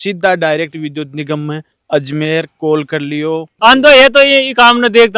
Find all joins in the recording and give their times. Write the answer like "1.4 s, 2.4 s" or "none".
1.7 s, 3.5 s